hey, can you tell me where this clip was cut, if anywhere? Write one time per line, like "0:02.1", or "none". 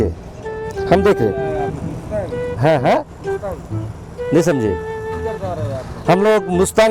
none